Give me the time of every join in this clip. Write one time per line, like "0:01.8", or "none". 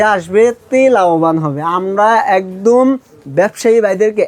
none